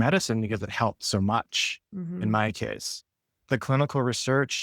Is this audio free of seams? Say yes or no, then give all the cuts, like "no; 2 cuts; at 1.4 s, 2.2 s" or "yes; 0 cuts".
no; 1 cut; at 3.5 s